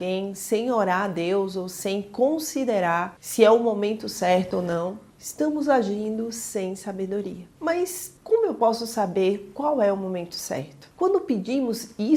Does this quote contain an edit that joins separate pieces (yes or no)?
no